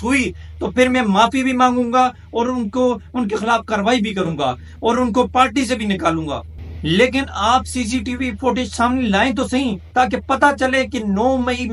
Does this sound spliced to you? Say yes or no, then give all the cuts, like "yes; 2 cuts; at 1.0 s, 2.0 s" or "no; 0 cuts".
no; 0 cuts